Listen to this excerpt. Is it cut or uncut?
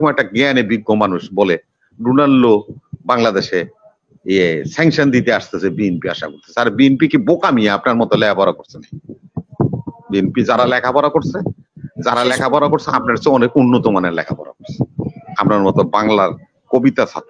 uncut